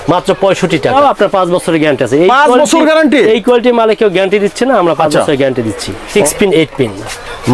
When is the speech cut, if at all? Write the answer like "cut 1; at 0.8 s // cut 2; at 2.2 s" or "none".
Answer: cut 1; at 0.9 s // cut 2; at 6.1 s